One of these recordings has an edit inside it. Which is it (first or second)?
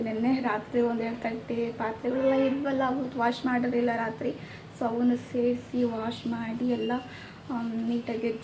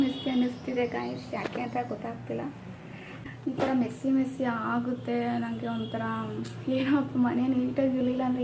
second